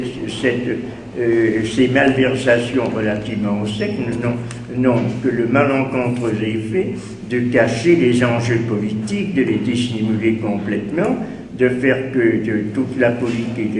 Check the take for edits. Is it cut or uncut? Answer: cut